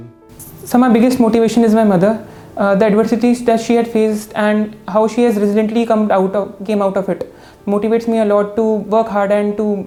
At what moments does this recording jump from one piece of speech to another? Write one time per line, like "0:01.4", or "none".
none

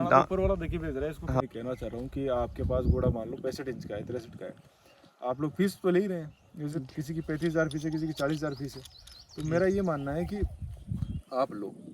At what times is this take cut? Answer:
0:01.4

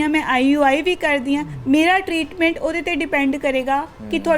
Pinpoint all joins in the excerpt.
0:01.5

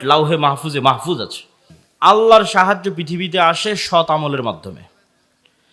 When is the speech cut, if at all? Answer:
0:01.7

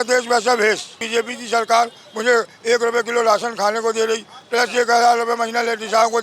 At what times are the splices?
0:01.0

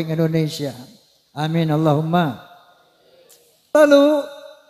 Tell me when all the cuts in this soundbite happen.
0:03.8

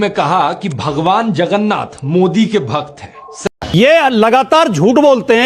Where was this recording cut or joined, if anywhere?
0:03.7

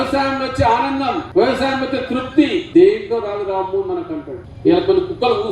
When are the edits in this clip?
0:01.2
0:02.7
0:04.4

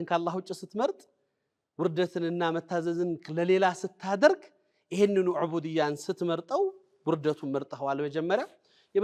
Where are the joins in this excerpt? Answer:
none

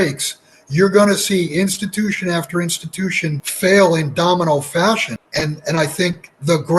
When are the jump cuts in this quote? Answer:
0:03.5
0:05.2

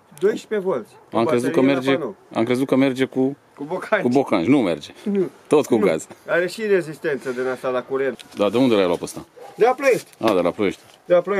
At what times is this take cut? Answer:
0:08.2

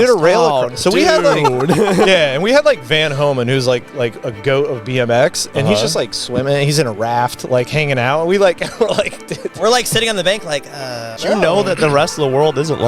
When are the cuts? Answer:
0:11.2

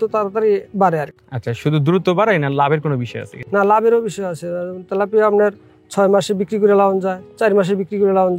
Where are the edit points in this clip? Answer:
none

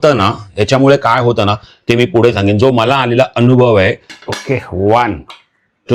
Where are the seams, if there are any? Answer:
0:04.1

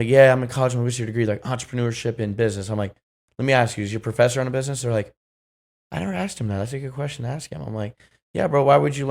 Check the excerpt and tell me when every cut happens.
none

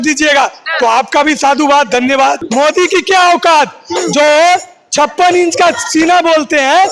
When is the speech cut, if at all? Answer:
0:02.4

